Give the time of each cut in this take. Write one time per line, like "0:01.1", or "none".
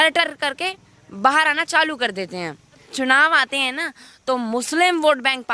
0:02.9